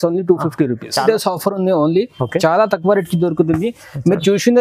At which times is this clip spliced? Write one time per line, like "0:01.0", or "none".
0:01.0